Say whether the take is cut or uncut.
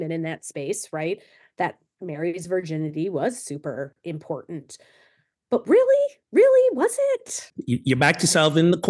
cut